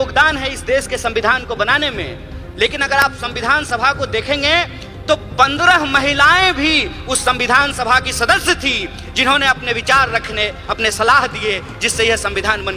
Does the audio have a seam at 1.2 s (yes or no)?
no